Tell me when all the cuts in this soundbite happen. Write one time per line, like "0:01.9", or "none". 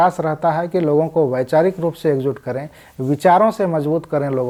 none